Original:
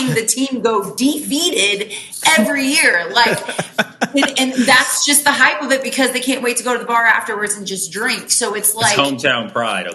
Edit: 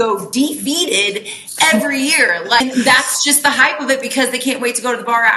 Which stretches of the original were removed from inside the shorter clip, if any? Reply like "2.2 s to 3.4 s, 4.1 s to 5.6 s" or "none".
3.3 s to 4.4 s

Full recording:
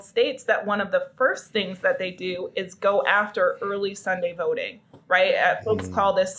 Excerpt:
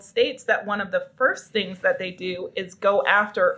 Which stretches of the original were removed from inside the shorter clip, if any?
none

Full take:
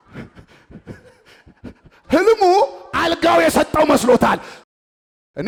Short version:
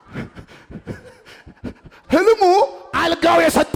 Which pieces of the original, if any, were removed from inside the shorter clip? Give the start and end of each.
none

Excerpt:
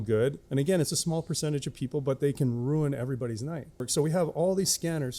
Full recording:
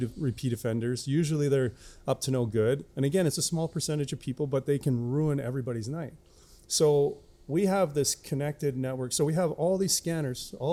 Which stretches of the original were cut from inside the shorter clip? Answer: 6.3 s to 9.0 s

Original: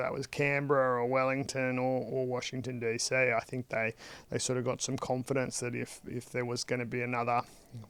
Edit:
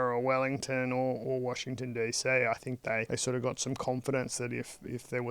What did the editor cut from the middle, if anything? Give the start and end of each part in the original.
3.9 s to 4.3 s

